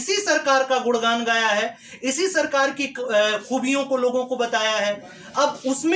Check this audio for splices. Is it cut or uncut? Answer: uncut